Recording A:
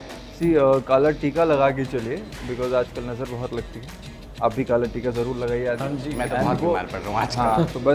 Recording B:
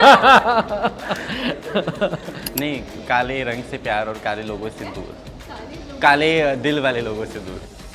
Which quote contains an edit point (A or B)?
B